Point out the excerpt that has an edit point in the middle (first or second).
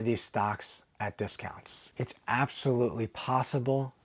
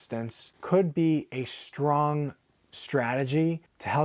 first